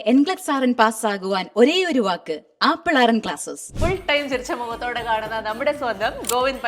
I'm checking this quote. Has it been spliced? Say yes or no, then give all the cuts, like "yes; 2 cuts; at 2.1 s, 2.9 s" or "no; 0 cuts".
yes; 1 cut; at 3.7 s